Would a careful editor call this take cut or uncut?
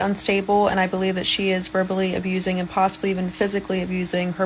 uncut